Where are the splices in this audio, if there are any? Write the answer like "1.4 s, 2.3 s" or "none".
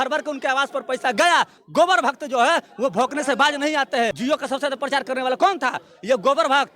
1.6 s, 4.2 s